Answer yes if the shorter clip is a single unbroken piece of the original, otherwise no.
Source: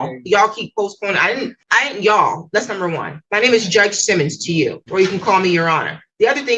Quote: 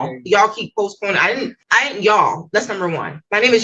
yes